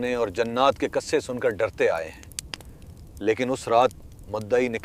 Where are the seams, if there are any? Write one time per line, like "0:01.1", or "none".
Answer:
none